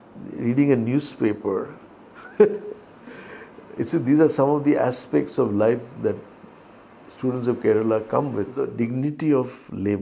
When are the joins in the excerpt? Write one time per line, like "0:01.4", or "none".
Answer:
0:08.7